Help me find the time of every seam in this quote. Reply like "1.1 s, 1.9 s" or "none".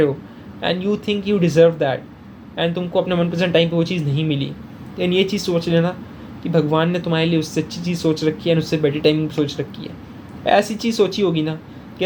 none